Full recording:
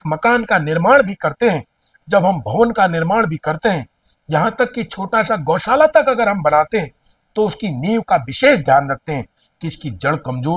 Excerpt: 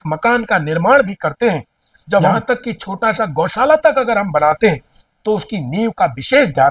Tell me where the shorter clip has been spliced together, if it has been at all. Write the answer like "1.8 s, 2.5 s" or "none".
2.3 s